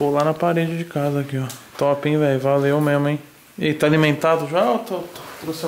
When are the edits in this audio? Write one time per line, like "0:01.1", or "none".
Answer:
none